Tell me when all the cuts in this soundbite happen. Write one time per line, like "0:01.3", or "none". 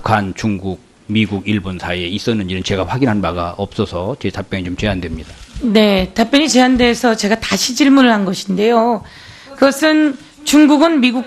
none